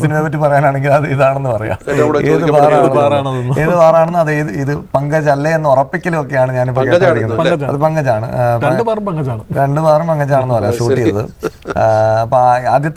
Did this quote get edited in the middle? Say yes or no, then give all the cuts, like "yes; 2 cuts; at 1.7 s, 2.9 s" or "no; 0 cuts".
no; 0 cuts